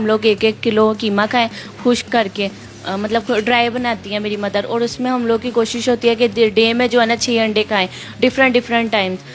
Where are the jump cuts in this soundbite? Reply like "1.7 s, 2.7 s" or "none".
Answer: none